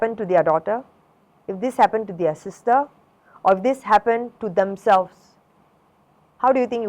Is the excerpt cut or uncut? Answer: uncut